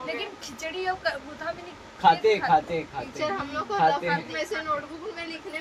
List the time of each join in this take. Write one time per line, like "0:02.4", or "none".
none